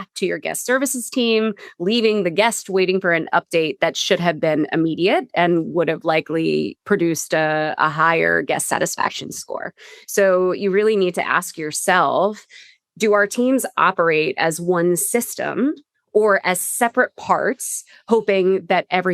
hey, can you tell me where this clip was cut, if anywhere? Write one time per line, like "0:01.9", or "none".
none